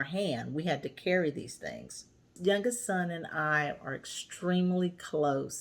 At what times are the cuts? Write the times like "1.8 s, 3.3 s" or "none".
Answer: 2.4 s